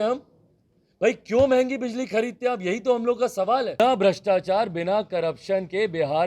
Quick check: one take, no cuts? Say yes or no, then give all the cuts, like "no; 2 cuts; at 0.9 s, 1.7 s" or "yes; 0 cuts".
no; 1 cut; at 3.8 s